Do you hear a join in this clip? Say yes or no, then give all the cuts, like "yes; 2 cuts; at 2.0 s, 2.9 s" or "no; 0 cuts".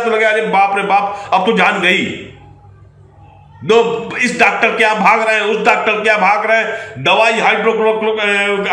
no; 0 cuts